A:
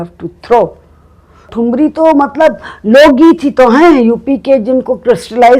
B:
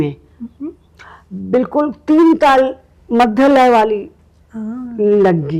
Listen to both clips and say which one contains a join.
A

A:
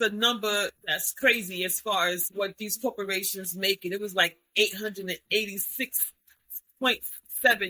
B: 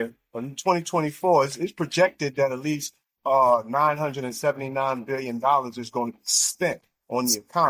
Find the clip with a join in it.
A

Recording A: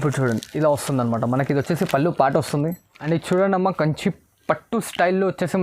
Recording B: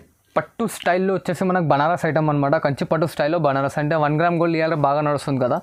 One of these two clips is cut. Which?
A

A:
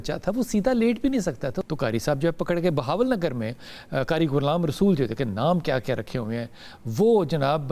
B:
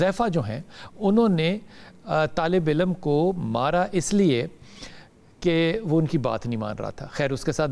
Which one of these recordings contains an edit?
A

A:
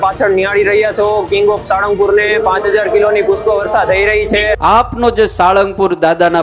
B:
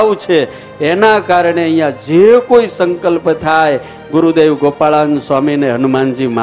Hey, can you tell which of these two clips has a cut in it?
A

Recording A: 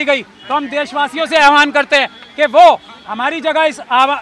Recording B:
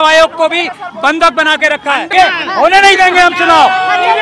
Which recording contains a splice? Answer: B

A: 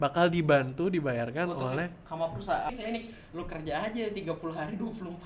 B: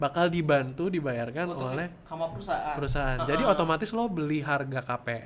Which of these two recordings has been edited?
A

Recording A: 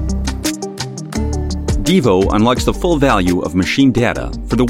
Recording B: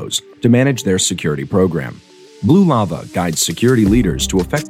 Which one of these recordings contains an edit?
A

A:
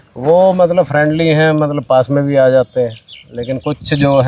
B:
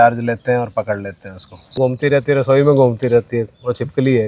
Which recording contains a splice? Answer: B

